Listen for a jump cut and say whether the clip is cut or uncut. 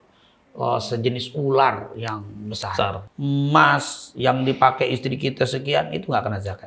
cut